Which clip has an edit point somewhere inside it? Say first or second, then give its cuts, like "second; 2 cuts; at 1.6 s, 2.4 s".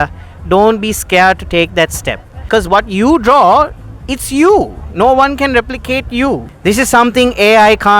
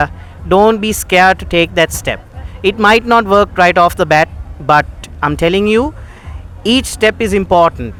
first; 2 cuts; at 2.5 s, 6.5 s